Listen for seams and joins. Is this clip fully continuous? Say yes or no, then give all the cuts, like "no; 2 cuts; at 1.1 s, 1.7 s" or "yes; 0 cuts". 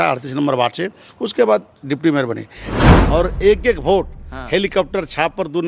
no; 1 cut; at 2.7 s